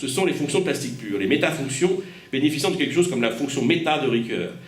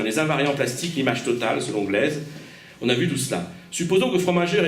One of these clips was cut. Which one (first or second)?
second